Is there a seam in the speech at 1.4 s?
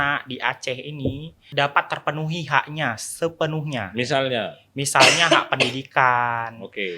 yes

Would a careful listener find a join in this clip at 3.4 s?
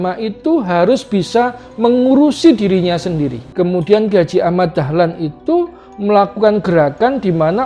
yes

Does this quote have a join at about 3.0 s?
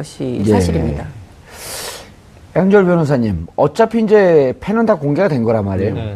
no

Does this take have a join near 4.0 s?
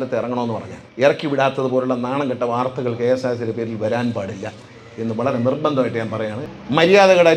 no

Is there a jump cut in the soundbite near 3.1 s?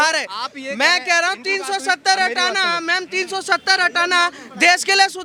no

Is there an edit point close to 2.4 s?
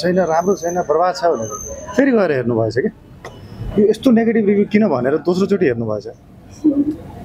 no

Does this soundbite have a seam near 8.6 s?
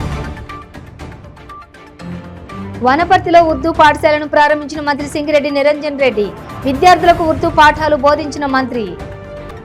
no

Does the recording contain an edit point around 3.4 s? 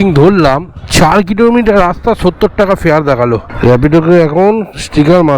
yes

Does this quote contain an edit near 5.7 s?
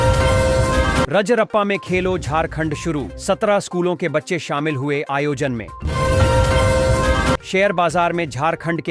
yes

